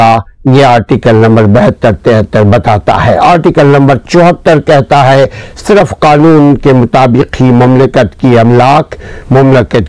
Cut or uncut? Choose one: uncut